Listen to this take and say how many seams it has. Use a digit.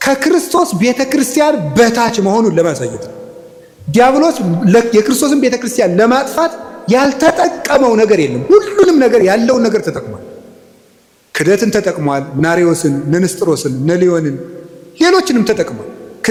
0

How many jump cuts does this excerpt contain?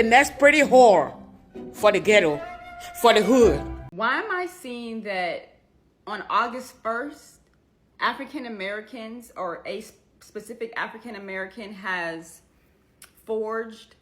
1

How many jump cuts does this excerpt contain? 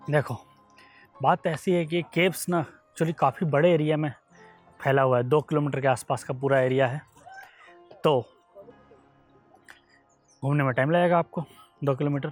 0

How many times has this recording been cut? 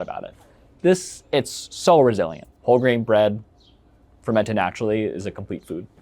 1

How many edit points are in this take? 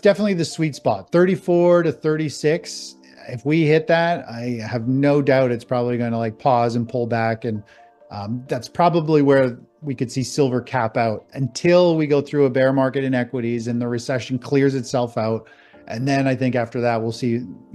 0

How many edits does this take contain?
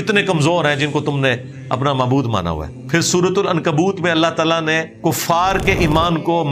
2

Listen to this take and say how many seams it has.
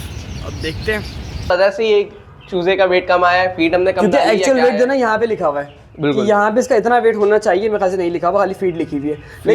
1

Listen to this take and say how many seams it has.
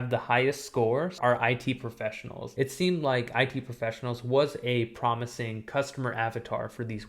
2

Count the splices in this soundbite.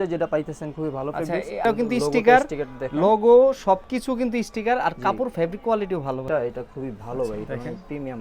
2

